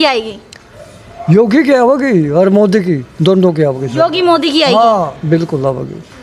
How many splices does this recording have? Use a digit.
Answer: 0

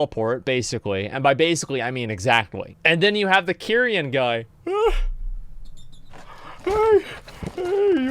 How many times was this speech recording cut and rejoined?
1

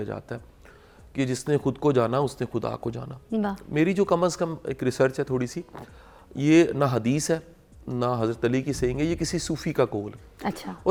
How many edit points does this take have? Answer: 0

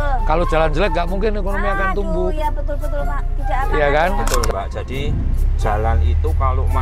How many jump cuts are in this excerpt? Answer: 1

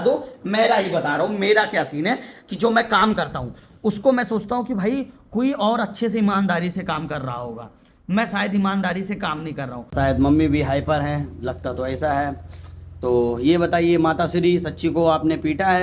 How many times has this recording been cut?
2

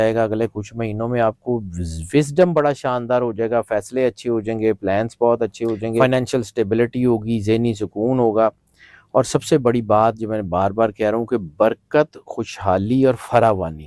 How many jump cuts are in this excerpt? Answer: 1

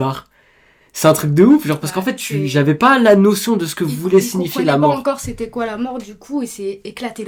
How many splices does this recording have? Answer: 0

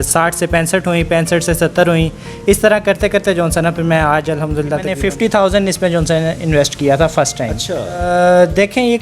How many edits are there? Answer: 2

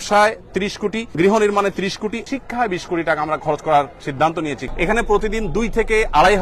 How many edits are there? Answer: 3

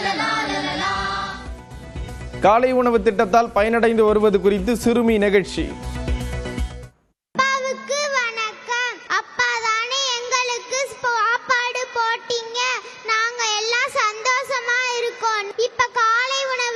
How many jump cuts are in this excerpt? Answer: 0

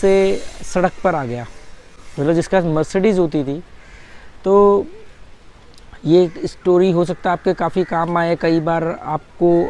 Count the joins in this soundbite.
0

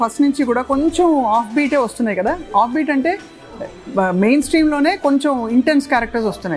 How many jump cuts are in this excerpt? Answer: 0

